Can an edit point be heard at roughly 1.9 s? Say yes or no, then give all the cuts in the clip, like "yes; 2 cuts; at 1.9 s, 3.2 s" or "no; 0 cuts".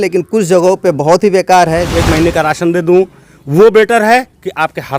yes; 1 cut; at 1.9 s